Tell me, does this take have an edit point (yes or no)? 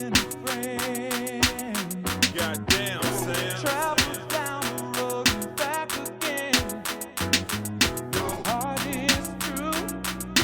no